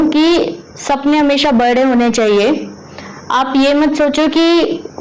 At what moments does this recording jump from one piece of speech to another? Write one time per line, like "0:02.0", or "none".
none